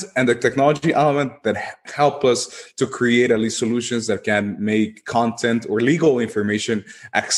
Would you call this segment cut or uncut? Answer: uncut